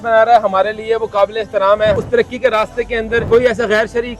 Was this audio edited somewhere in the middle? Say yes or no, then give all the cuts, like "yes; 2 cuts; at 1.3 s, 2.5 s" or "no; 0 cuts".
yes; 2 cuts; at 2.0 s, 3.2 s